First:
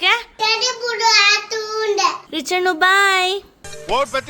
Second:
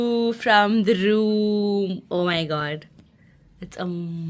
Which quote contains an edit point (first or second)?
first